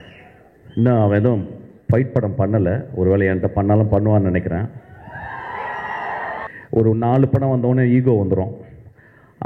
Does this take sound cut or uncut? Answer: cut